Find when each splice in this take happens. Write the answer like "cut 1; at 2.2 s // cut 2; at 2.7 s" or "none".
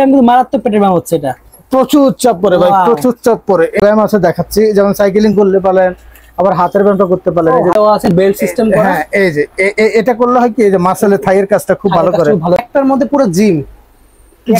cut 1; at 3.8 s // cut 2; at 7.7 s // cut 3; at 12.6 s